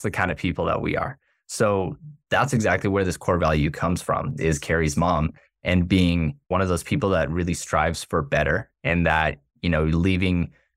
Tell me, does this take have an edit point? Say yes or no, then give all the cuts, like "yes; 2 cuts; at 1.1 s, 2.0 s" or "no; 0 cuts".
yes; 2 cuts; at 4.3 s, 6.5 s